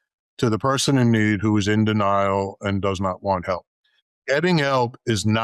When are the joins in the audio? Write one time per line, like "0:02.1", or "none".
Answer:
none

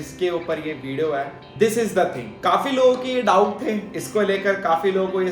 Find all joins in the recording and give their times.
0:01.4
0:02.3

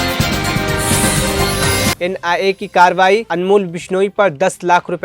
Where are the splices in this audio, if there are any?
0:01.9

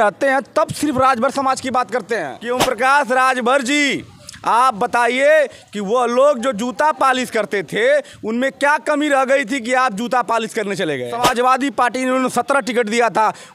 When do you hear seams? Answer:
0:02.4
0:11.2

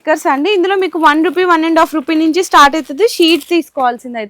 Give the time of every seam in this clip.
none

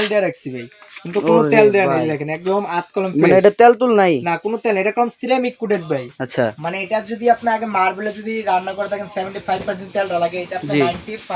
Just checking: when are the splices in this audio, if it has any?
none

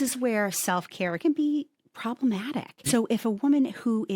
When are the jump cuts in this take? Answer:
0:01.2

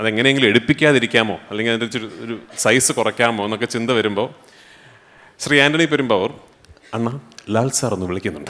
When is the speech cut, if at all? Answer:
none

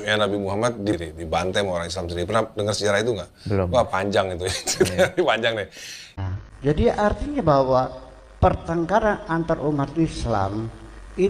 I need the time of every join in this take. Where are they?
0:01.0

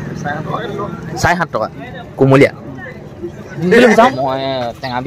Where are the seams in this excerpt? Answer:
0:04.1

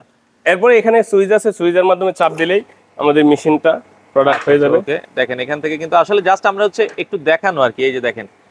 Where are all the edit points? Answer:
none

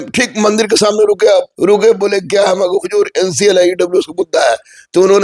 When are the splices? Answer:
0:01.5

